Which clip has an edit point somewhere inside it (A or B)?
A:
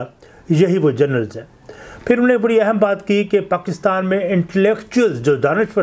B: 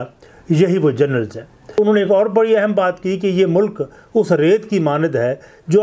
B